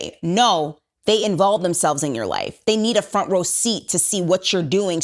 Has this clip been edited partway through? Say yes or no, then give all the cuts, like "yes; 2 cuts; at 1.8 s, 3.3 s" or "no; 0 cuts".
no; 0 cuts